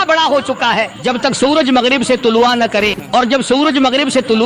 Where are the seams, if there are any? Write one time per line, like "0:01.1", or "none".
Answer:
0:00.9
0:03.2

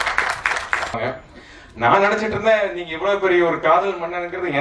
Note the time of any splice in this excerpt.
0:01.0

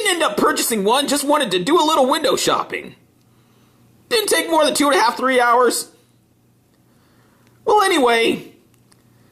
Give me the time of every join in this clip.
0:01.6

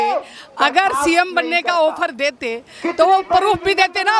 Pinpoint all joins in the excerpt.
none

